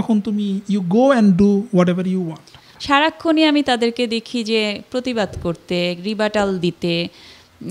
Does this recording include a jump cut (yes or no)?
yes